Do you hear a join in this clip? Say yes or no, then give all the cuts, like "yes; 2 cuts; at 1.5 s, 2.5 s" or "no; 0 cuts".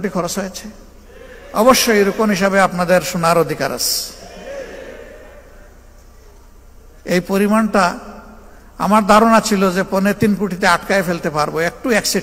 no; 0 cuts